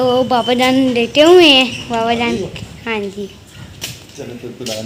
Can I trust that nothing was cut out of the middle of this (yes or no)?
yes